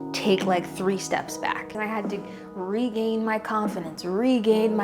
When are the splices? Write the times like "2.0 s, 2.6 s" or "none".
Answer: 1.7 s